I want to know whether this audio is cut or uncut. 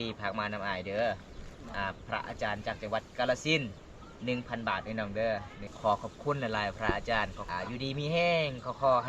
cut